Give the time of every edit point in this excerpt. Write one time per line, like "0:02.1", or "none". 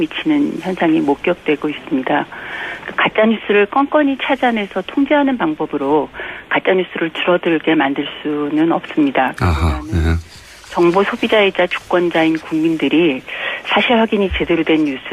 0:11.3